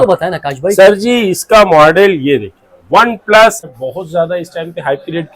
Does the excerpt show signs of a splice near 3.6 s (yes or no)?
yes